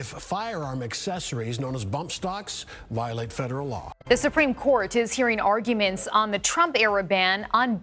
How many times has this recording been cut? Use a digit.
1